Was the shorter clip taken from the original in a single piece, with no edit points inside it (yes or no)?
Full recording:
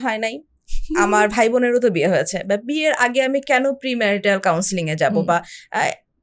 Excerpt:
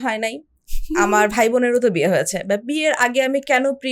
yes